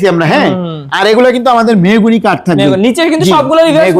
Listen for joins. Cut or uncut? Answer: uncut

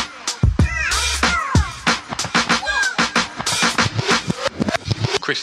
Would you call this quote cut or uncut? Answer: uncut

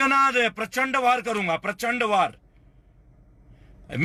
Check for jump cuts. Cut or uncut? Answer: uncut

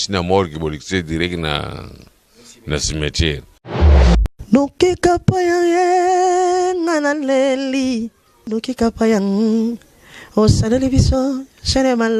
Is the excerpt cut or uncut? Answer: uncut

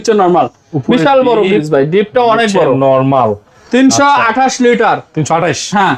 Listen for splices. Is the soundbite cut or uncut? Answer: uncut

